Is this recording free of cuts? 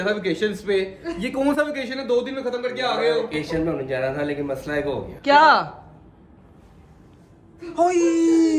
yes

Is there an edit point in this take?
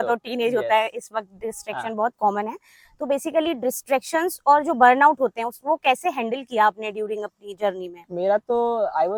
no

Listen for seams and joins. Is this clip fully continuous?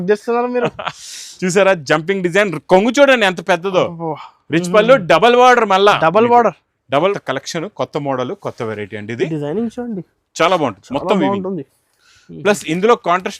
no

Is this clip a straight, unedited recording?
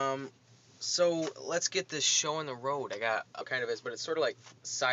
yes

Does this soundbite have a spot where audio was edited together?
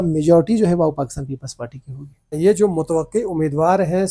yes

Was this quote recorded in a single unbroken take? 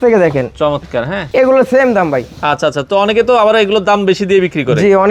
no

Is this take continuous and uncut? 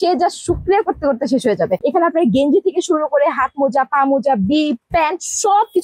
yes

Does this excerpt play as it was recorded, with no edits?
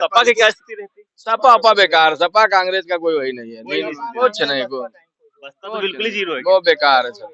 yes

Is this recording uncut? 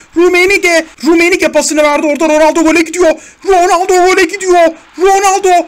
no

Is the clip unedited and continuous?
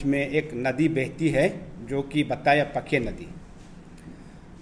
yes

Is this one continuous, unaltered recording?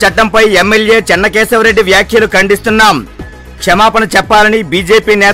yes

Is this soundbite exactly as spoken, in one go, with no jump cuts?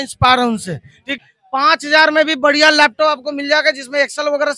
no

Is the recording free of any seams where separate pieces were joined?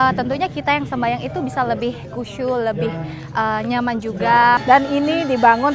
no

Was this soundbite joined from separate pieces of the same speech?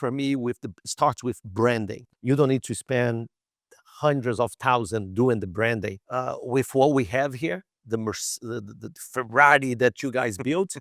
yes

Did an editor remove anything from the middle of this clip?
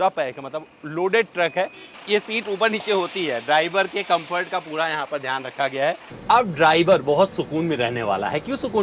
yes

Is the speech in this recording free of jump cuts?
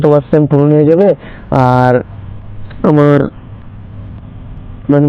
yes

